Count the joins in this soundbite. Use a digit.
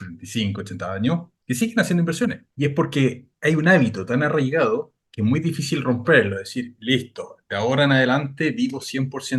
4